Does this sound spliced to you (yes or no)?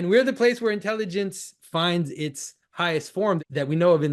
yes